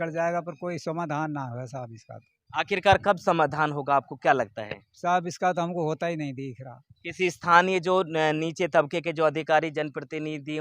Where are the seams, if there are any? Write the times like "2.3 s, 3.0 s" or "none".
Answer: none